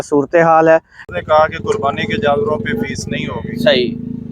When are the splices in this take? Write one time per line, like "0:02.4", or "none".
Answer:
0:01.0